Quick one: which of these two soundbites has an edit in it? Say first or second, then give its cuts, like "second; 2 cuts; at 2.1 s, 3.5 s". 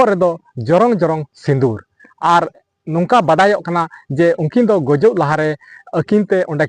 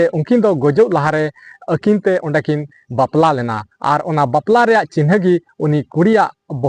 first; 1 cut; at 2.7 s